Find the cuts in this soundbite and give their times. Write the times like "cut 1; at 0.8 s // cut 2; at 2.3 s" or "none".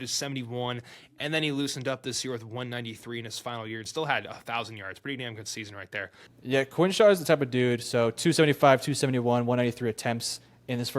cut 1; at 6.2 s

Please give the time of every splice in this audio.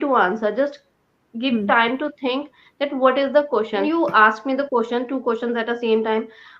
cut 1; at 3.8 s

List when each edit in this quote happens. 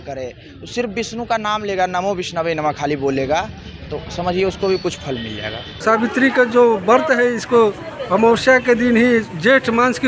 cut 1; at 5.8 s

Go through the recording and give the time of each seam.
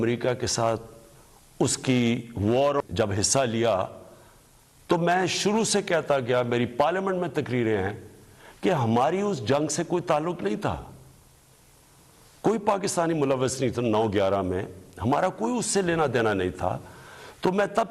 cut 1; at 2.8 s

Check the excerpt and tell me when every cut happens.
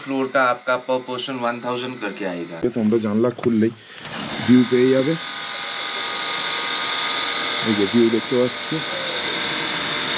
cut 1; at 2.6 s

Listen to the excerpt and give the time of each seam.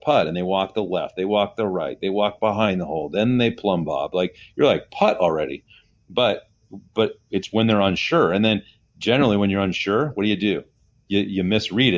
none

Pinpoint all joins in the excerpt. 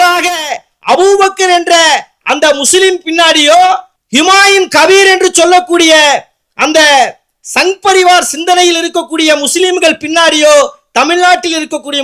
cut 1; at 4.0 s

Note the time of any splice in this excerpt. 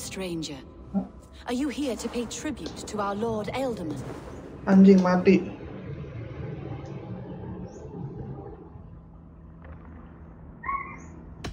none

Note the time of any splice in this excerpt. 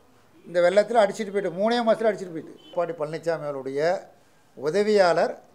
cut 1; at 2.7 s

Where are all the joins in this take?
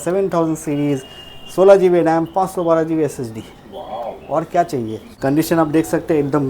cut 1; at 5.0 s

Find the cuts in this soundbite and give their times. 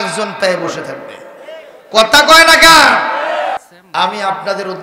cut 1; at 3.7 s

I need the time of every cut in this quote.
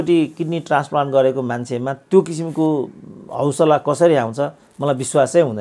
none

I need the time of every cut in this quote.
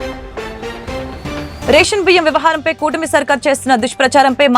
cut 1; at 1.6 s

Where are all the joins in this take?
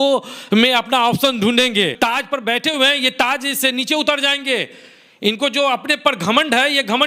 cut 1; at 1.9 s

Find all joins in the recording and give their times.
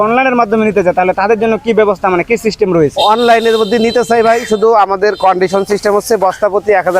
none

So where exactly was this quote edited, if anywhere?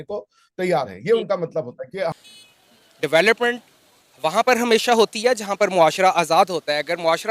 cut 1; at 2.1 s

